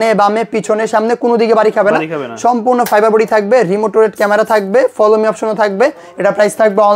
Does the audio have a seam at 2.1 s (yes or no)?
no